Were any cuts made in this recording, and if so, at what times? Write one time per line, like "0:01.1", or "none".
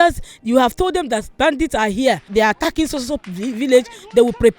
0:02.3